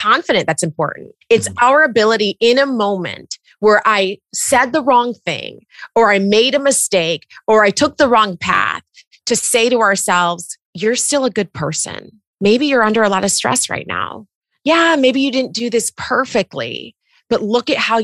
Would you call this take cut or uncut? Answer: cut